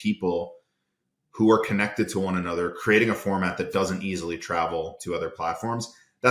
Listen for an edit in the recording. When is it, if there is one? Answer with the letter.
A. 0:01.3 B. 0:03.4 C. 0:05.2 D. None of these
D